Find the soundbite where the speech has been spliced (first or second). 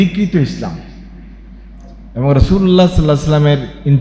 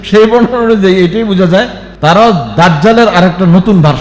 second